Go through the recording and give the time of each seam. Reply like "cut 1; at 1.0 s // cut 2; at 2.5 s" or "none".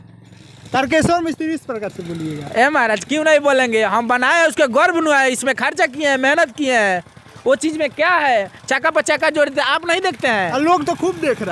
none